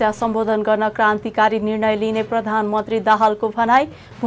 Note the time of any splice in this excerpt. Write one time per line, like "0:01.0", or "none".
none